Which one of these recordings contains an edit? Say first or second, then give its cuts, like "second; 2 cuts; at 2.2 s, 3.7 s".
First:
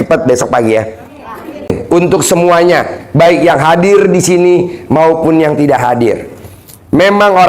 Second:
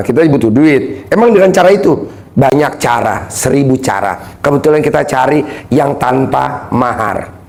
first; 1 cut; at 1.7 s